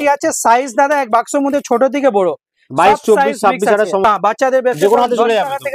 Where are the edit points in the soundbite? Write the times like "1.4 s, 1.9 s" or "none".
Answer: 4.0 s